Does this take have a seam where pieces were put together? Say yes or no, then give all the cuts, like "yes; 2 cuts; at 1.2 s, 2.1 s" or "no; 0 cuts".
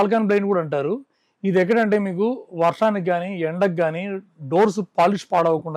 no; 0 cuts